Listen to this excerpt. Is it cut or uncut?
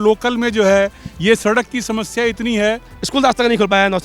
cut